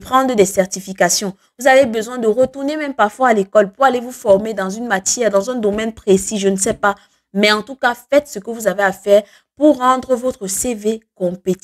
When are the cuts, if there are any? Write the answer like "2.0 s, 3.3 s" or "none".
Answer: none